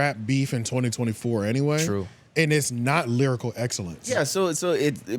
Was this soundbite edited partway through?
yes; 1 cut; at 4.1 s

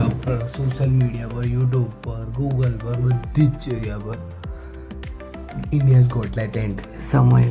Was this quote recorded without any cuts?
yes; 0 cuts

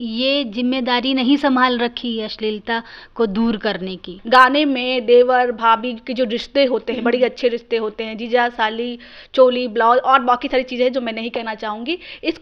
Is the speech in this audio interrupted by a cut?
yes; 1 cut; at 4.1 s

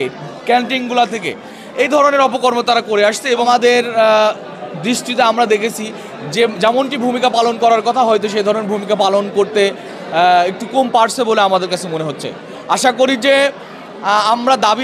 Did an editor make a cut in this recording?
yes; 1 cut; at 3.4 s

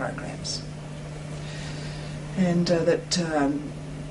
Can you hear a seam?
no; 0 cuts

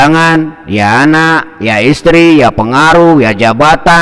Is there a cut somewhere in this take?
no; 0 cuts

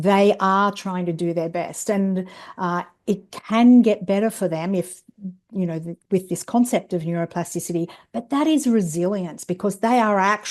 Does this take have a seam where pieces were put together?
no; 0 cuts

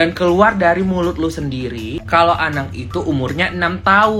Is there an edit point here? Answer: no; 0 cuts

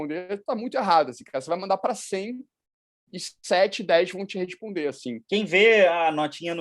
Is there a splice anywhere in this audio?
yes; 1 cut; at 5.1 s

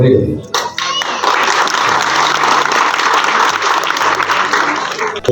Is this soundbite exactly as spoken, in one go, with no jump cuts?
yes; 0 cuts

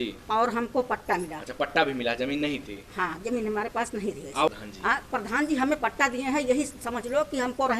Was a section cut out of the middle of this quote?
yes; 1 cut; at 4.5 s

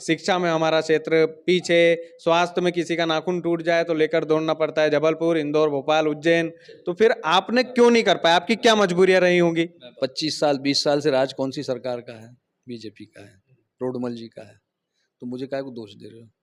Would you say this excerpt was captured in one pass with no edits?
no; 1 cut; at 9.8 s

